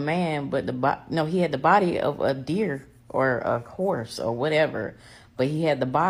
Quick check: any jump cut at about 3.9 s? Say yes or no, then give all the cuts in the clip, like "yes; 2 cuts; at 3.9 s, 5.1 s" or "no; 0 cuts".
no; 0 cuts